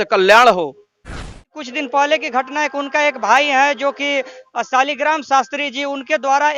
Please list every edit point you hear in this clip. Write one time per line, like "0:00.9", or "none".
0:01.4